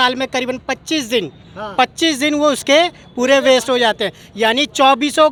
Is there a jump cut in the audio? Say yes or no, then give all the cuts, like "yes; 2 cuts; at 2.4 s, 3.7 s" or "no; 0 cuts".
no; 0 cuts